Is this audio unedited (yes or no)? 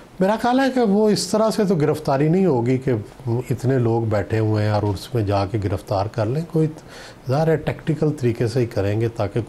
yes